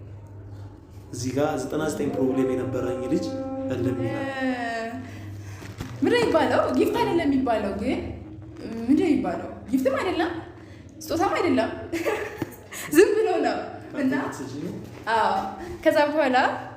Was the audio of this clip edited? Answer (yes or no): yes